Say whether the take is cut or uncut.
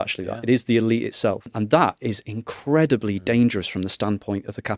cut